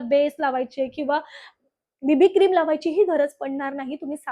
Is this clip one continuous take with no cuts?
yes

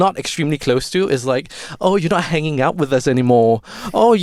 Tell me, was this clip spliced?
no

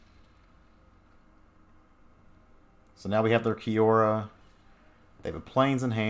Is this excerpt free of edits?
yes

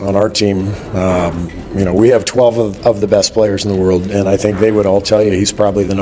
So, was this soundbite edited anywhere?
no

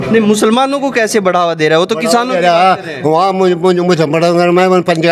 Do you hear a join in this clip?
no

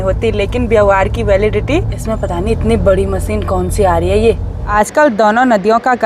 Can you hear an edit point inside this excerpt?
yes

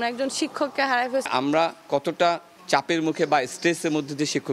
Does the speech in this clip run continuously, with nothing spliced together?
no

